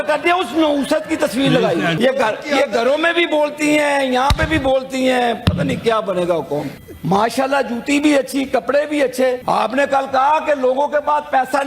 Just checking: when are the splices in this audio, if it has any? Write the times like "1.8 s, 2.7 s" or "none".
1.9 s, 6.8 s, 9.4 s